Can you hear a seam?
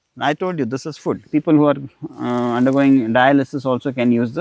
yes; 1 cut; at 1.2 s

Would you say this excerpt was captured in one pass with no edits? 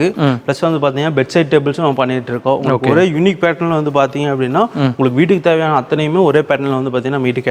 yes; 0 cuts

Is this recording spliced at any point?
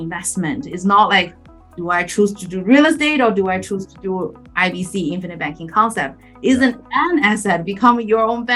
no; 0 cuts

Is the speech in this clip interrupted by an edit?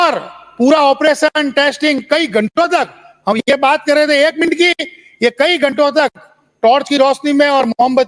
no; 0 cuts

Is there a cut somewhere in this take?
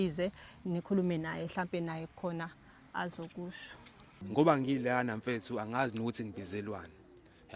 yes; 1 cut; at 4.2 s

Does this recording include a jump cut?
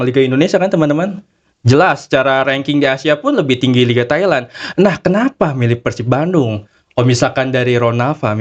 no; 0 cuts

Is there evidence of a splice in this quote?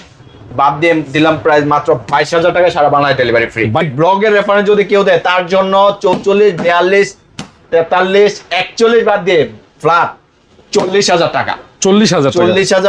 yes; 1 cut; at 3.9 s

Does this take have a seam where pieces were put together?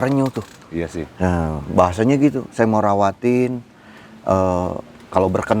no; 0 cuts

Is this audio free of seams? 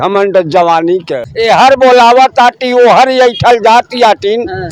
no; 1 cut; at 1.2 s

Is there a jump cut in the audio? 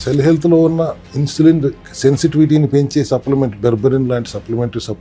no; 0 cuts

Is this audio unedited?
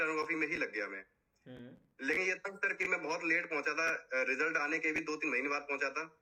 yes; 0 cuts

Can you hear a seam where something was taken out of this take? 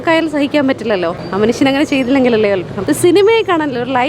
yes; 2 cuts; at 1.2 s, 2.7 s

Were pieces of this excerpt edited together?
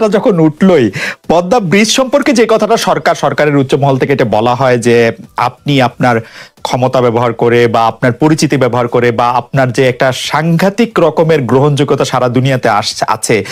no; 0 cuts

